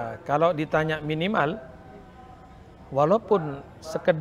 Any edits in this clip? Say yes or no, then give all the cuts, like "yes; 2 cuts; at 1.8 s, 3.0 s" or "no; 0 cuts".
no; 0 cuts